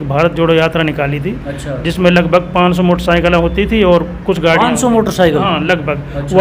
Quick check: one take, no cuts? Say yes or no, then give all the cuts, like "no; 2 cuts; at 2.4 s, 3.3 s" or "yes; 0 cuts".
yes; 0 cuts